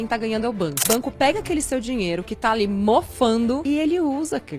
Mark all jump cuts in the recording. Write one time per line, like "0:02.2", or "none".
0:00.8
0:03.6